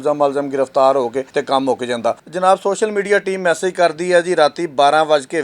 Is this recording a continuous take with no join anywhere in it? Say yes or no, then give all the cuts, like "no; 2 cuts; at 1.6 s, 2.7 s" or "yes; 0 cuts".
no; 2 cuts; at 1.3 s, 2.3 s